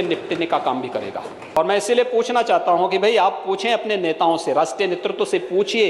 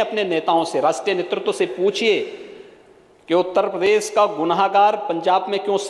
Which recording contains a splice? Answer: first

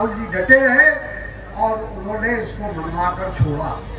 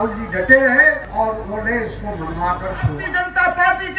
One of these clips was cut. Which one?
second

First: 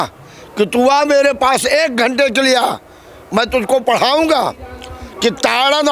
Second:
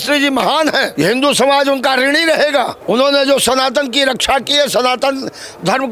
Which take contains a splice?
second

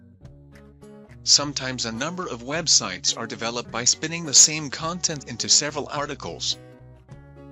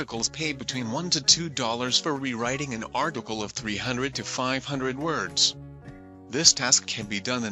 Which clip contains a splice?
first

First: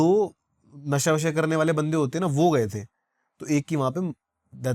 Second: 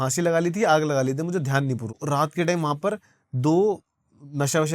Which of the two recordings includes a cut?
second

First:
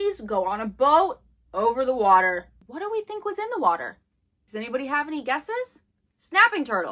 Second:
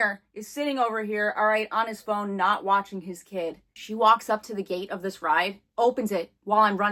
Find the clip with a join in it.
first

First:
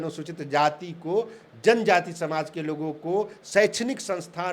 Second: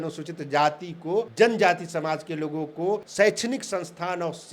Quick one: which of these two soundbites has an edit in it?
second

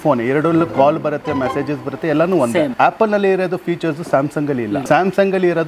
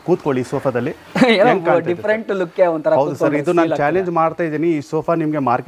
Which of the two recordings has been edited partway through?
first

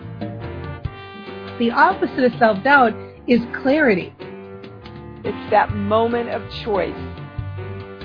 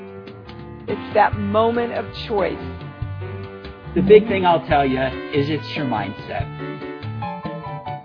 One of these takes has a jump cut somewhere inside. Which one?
first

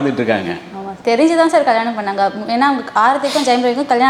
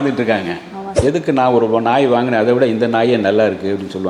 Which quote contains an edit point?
second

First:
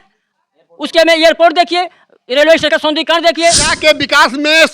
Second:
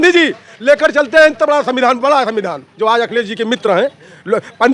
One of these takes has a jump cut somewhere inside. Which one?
first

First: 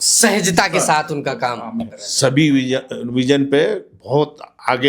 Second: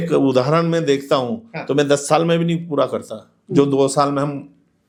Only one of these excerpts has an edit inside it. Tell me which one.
first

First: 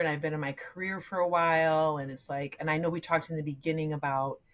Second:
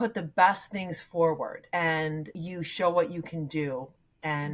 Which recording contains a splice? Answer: second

